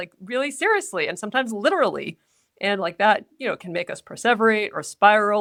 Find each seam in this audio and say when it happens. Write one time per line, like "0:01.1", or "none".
none